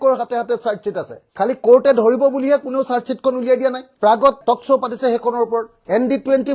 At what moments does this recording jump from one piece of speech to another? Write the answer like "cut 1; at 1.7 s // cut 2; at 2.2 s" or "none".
cut 1; at 3.9 s